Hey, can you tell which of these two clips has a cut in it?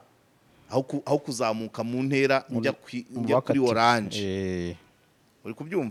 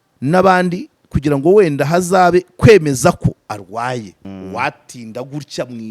second; 1 cut; at 4.2 s

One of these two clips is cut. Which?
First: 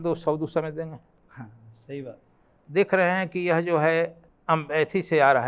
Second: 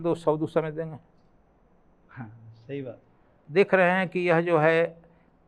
first; 2 cuts; at 1.2 s, 4.3 s

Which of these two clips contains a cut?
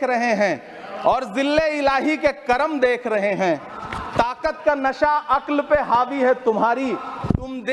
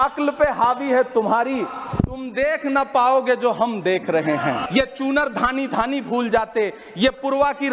second; 1 cut; at 4.6 s

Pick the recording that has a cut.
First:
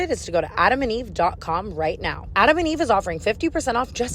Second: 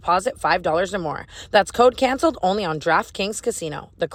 first; 1 cut; at 2.2 s

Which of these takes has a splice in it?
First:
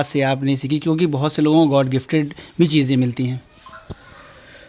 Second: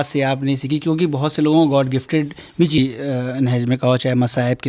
second; 1 cut; at 2.8 s

